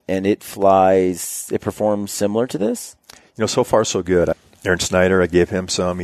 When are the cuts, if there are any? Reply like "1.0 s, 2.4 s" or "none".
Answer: 4.3 s